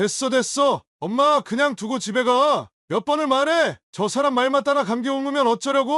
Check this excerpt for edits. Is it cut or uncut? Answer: uncut